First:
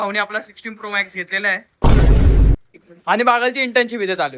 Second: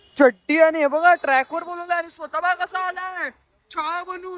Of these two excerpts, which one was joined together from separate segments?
first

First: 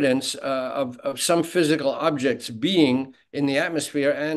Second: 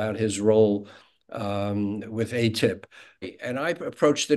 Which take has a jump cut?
second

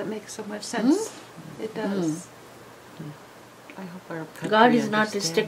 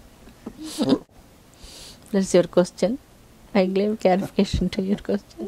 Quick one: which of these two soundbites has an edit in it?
second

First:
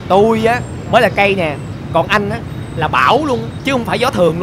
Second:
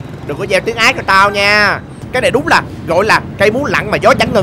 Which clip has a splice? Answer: second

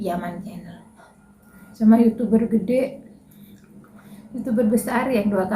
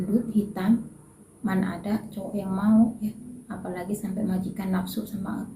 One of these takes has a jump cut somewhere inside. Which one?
first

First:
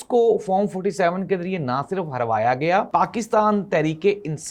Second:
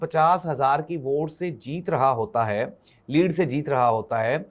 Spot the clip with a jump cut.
first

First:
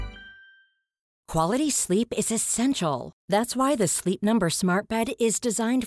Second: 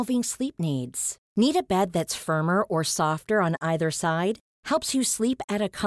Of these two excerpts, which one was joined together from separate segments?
first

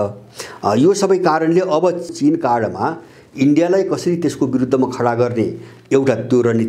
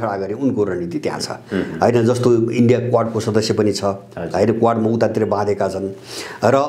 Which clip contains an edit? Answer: first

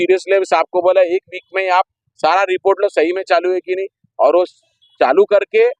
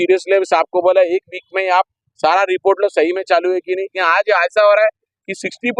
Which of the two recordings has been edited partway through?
second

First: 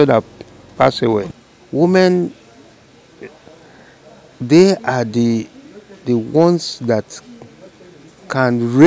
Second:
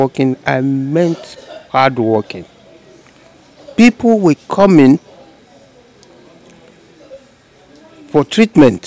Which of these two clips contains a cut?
first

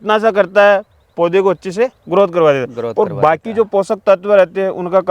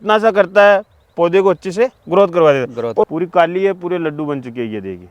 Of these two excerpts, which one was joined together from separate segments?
second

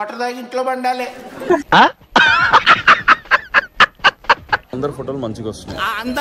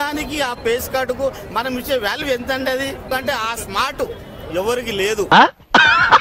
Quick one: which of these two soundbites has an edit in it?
first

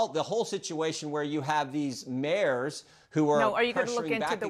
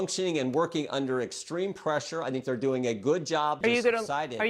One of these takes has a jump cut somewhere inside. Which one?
second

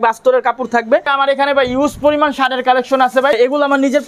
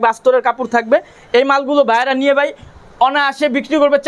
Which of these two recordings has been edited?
first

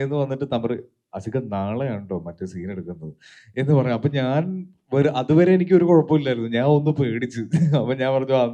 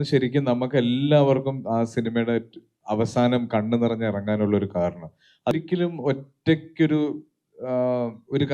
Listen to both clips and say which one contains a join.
second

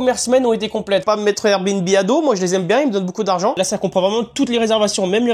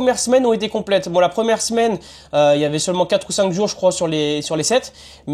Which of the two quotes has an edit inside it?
first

